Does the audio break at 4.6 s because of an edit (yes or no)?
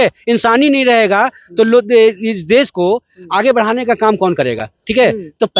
no